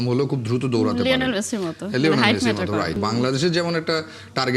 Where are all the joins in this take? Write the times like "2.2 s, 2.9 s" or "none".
3.0 s